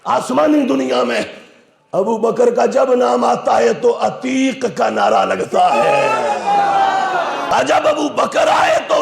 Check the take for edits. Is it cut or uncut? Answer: cut